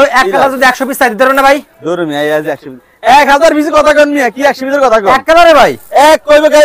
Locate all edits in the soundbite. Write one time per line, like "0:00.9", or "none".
none